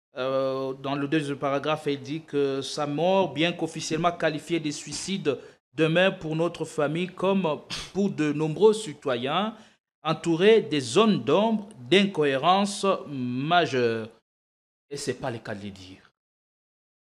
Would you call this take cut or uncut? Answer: uncut